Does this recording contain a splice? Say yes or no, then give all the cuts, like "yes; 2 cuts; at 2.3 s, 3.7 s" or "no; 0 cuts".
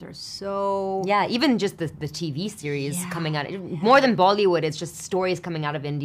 no; 0 cuts